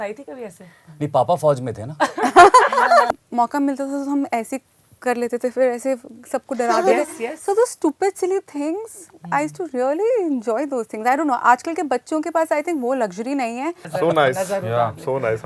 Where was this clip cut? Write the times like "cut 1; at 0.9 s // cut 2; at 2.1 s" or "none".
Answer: cut 1; at 3.1 s // cut 2; at 13.9 s